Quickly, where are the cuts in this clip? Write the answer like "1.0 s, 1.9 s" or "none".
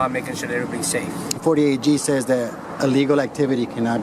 1.4 s